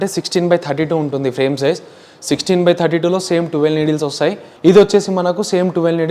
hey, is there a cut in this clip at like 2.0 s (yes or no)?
no